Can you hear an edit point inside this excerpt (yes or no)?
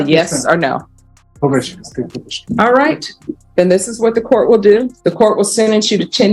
yes